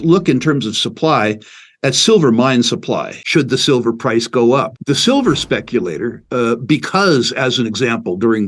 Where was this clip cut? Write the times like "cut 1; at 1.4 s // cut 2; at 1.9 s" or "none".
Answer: cut 1; at 3.1 s // cut 2; at 4.7 s